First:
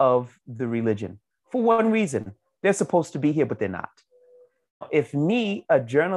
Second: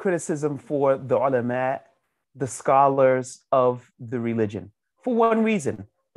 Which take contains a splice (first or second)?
first